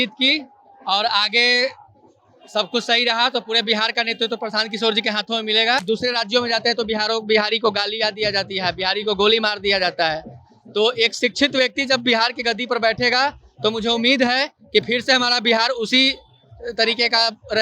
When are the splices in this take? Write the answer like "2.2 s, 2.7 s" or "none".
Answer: 5.8 s